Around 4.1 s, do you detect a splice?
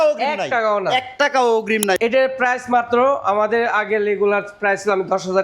no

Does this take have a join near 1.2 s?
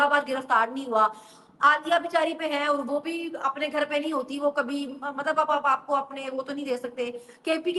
no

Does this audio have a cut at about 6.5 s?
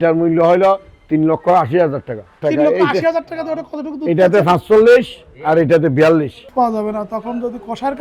yes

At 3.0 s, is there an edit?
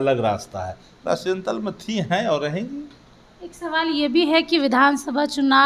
no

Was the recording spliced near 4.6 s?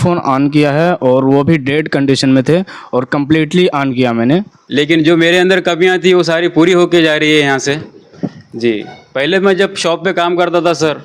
yes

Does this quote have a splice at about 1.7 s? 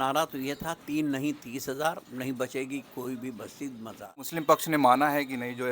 no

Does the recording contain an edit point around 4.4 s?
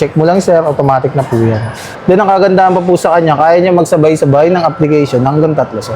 no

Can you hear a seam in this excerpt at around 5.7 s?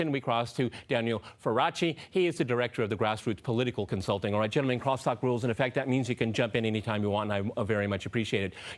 yes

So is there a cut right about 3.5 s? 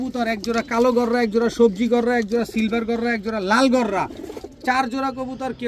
no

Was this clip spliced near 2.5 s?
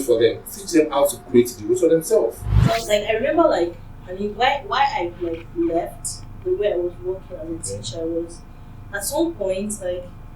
yes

